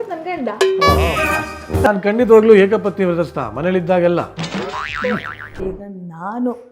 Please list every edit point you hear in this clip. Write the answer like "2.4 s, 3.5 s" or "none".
1.9 s